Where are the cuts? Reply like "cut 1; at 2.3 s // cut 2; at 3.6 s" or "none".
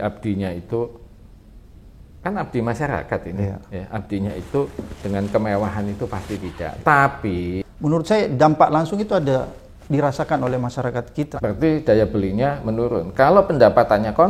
cut 1; at 7.6 s // cut 2; at 11.3 s